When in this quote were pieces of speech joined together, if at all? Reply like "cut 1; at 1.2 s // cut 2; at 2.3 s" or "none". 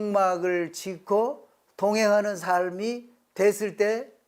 none